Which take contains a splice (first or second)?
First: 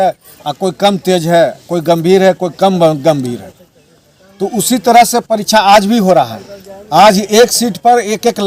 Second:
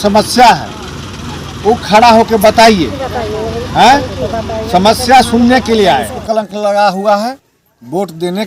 second